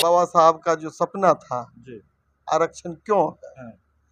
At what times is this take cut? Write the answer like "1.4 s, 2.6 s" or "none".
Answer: none

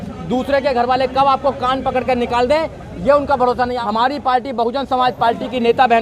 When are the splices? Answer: 3.8 s

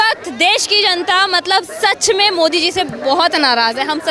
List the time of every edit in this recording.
none

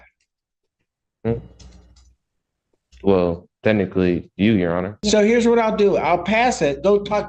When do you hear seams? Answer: 5.0 s

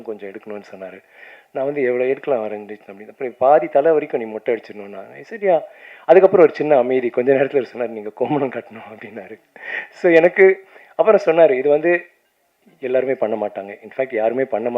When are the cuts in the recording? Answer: none

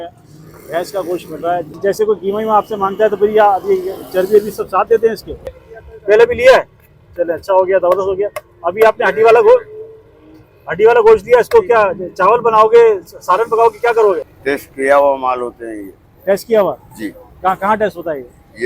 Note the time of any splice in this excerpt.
1.7 s, 5.7 s, 14.3 s

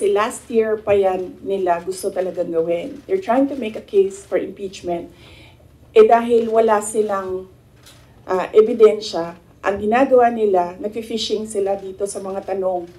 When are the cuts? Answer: none

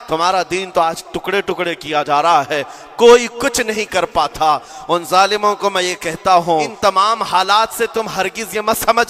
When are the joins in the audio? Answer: 6.7 s

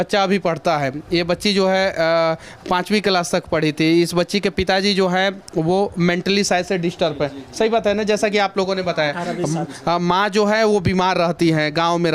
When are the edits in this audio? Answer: none

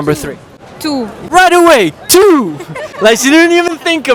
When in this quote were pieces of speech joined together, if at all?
none

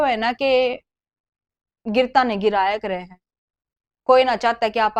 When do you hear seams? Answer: none

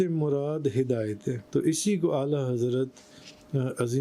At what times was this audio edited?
1.4 s

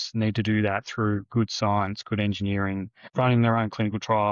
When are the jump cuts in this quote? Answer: 3.0 s

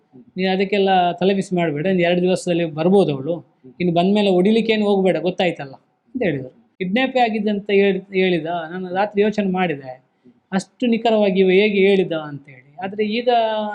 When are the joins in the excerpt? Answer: 6.7 s

